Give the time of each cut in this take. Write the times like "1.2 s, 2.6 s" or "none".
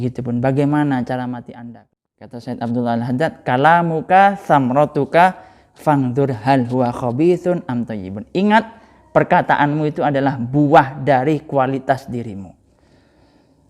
1.7 s